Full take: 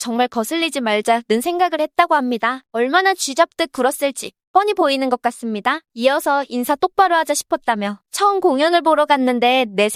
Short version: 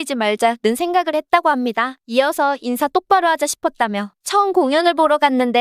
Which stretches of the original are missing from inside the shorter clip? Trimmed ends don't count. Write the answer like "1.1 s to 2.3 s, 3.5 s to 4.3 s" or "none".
2.6 s to 5.9 s